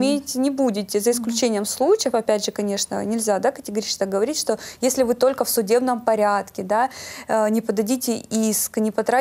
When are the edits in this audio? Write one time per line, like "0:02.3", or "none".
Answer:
none